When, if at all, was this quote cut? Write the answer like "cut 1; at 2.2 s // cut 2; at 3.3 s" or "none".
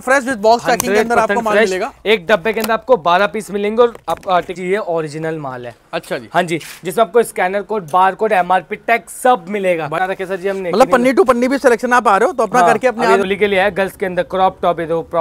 cut 1; at 4.5 s // cut 2; at 10.0 s // cut 3; at 13.2 s